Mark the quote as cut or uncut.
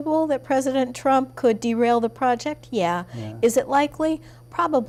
uncut